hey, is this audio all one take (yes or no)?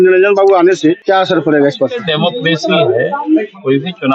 no